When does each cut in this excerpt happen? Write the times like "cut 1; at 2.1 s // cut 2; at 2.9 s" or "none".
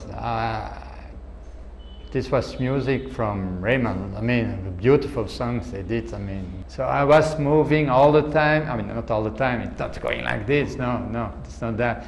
cut 1; at 6.6 s